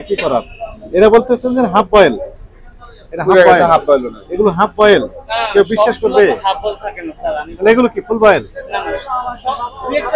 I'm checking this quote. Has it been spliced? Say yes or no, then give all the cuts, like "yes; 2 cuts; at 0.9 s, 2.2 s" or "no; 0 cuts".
no; 0 cuts